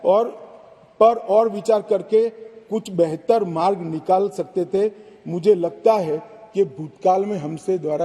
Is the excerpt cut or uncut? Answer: uncut